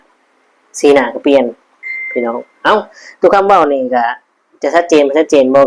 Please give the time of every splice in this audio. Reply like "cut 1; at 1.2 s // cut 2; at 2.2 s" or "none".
none